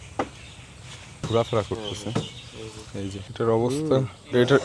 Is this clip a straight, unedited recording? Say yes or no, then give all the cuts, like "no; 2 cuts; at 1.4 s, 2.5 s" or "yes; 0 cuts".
no; 2 cuts; at 1.2 s, 3.2 s